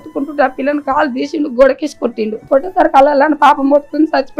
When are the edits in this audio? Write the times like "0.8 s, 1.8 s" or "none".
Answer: 2.3 s